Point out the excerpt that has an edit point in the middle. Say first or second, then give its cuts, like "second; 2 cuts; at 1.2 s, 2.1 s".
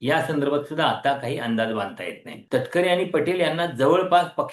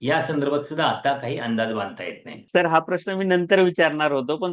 first; 1 cut; at 2.3 s